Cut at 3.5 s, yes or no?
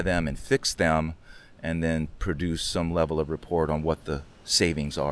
no